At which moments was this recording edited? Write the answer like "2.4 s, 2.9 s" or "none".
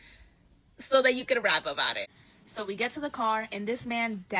2.1 s